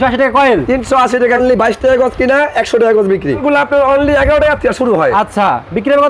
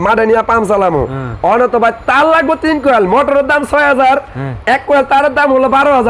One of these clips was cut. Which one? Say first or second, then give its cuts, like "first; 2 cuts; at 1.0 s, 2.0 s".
first; 2 cuts; at 1.4 s, 3.4 s